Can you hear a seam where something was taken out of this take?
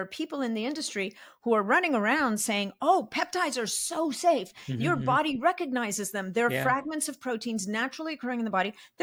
no; 0 cuts

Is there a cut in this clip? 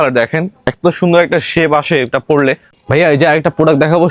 yes; 1 cut; at 2.7 s

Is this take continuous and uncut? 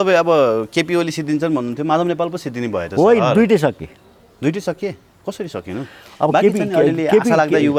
yes; 0 cuts

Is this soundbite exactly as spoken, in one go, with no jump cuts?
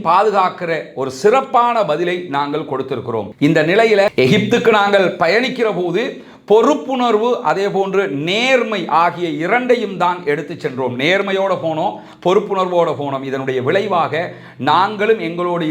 yes; 0 cuts

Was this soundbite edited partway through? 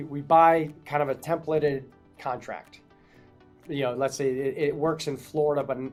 no; 0 cuts

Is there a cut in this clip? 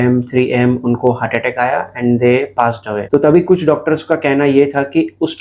no; 0 cuts

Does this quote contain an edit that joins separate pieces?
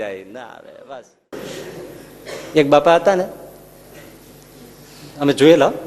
yes; 1 cut; at 1.3 s

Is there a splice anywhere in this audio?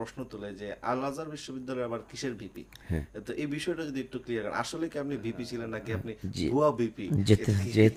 no; 0 cuts

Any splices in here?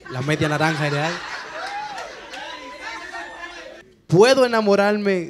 yes; 1 cut; at 3.9 s

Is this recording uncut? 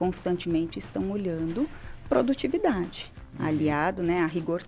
yes; 0 cuts

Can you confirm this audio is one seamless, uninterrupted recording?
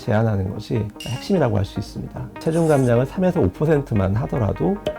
no; 2 cuts; at 0.9 s, 2.4 s

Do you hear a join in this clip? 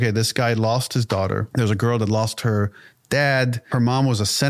yes; 2 cuts; at 1.5 s, 3.6 s

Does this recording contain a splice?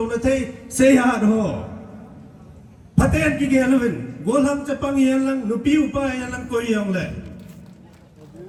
no; 0 cuts

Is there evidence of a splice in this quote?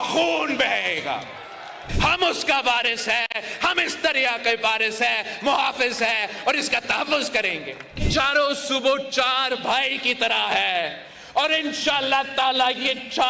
yes; 2 cuts; at 1.9 s, 8.0 s

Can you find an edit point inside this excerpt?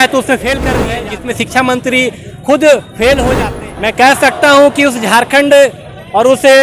yes; 2 cuts; at 0.9 s, 3.3 s

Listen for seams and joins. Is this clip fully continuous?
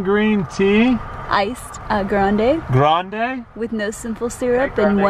yes; 0 cuts

